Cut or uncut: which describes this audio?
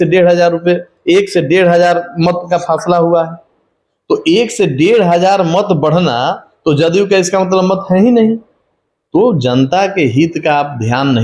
uncut